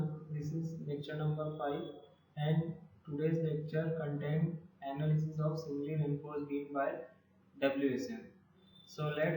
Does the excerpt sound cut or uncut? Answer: uncut